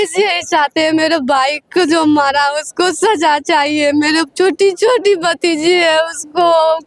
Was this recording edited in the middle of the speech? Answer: no; 0 cuts

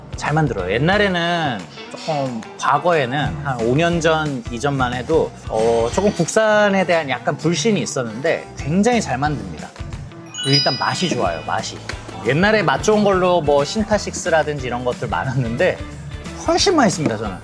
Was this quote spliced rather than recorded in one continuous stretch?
no; 0 cuts

